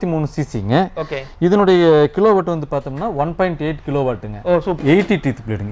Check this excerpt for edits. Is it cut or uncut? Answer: cut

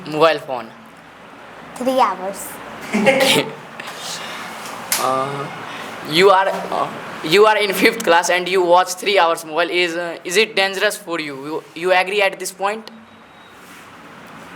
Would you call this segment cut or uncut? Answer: uncut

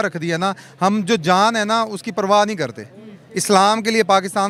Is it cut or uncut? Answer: uncut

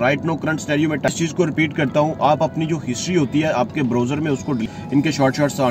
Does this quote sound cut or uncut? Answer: cut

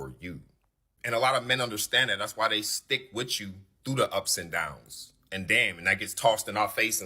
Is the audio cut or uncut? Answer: cut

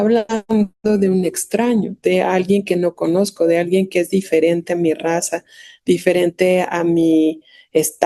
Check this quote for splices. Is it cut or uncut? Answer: uncut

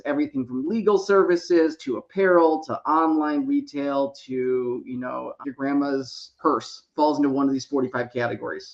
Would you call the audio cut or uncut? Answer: cut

